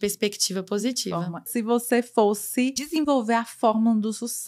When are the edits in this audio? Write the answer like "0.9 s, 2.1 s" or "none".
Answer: 1.5 s, 2.8 s

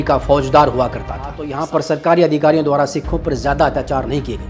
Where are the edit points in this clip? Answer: 1.5 s

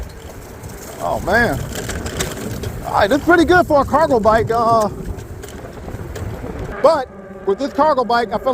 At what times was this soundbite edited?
6.6 s

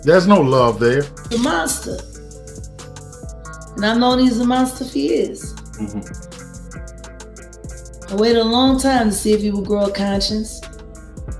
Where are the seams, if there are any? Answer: 1.2 s

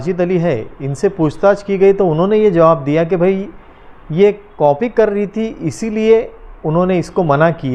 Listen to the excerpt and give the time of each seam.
none

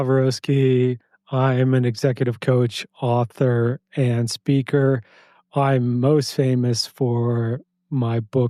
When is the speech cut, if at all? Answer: none

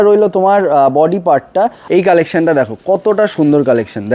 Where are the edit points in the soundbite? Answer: 1.8 s

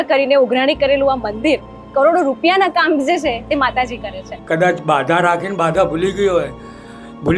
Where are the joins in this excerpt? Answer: 1.8 s, 4.3 s

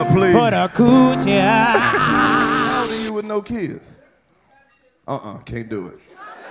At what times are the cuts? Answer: 2.8 s

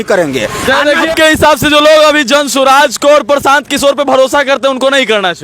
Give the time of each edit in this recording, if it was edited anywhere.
1.1 s

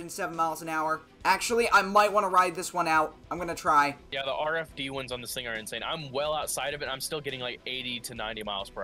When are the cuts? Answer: 1.1 s, 4.0 s

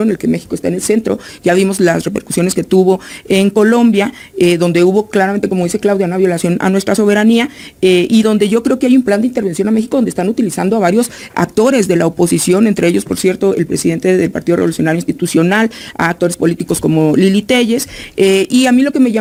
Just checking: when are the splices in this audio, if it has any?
none

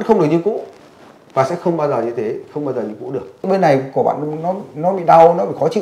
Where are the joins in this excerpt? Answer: 3.5 s

